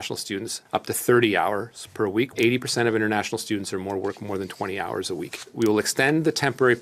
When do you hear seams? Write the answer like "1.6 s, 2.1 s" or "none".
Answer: 2.3 s, 5.5 s